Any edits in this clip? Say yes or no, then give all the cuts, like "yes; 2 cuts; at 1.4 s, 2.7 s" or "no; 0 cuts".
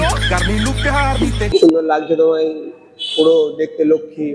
yes; 1 cut; at 1.5 s